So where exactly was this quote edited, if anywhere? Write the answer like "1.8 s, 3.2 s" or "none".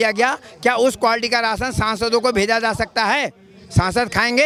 none